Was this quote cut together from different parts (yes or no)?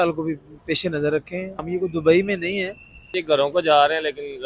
yes